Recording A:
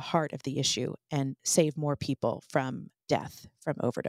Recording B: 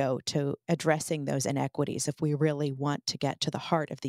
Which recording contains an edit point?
A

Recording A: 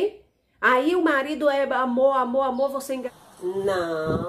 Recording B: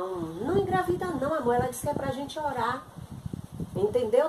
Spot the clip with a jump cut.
A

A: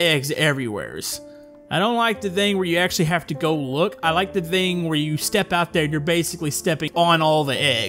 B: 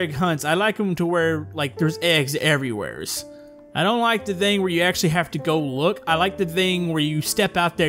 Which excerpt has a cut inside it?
A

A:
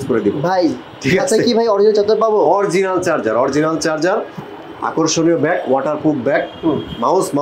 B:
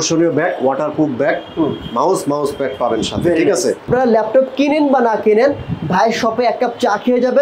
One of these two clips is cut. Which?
B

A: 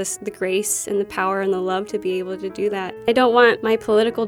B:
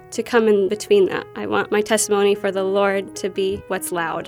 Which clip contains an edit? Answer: A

